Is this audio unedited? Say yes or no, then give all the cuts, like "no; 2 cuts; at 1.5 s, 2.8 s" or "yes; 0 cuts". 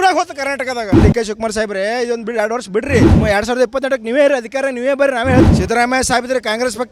no; 3 cuts; at 1.0 s, 3.1 s, 5.5 s